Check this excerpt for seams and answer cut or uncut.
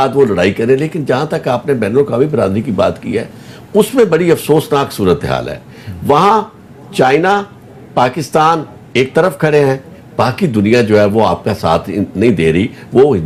uncut